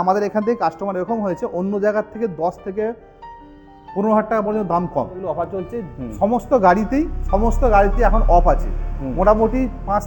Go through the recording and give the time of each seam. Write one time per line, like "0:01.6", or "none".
0:05.2